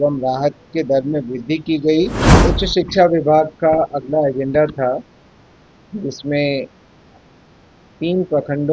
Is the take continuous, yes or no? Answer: no